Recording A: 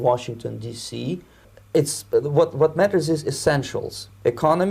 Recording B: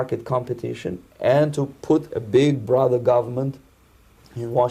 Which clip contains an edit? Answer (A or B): A